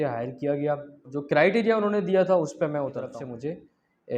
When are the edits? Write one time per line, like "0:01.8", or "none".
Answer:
0:01.1
0:03.1